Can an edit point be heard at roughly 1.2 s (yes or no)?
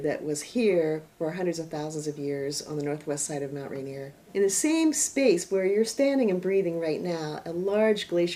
no